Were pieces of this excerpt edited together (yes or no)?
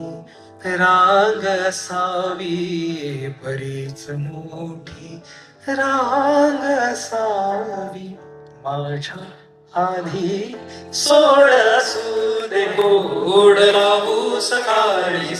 yes